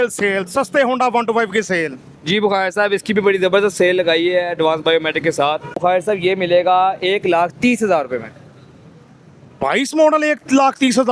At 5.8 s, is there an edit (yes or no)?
yes